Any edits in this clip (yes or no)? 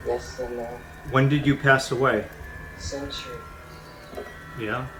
no